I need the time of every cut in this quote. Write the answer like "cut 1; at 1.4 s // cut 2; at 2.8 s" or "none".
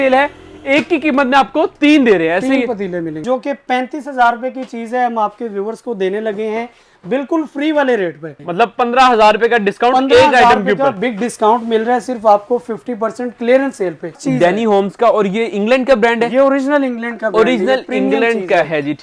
cut 1; at 3.2 s // cut 2; at 8.3 s // cut 3; at 14.2 s